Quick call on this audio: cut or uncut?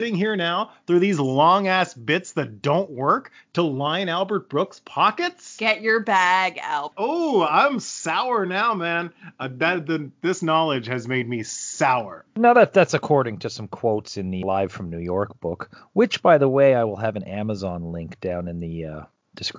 cut